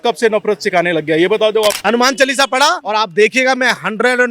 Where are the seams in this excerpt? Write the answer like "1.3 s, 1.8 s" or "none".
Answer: 1.8 s, 2.8 s